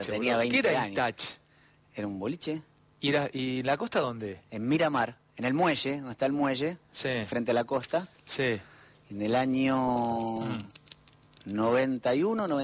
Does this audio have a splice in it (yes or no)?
no